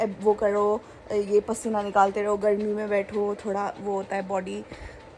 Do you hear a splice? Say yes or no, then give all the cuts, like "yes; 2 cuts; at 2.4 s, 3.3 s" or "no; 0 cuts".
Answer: no; 0 cuts